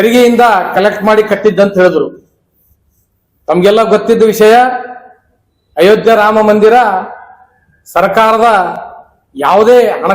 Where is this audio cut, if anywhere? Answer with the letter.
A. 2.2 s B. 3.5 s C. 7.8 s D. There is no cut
D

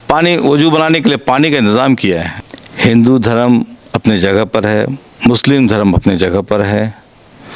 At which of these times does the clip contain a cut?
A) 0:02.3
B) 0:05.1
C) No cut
A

